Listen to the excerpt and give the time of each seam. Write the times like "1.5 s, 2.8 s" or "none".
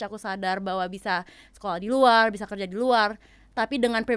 none